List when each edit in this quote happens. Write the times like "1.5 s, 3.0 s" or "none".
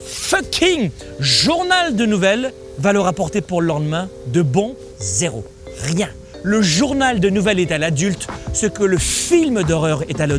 2.6 s, 4.8 s, 6.3 s